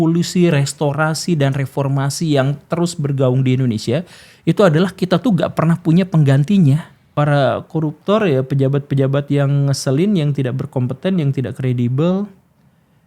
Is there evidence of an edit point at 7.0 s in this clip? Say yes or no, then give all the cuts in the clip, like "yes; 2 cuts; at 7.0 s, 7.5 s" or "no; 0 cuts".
yes; 1 cut; at 7.0 s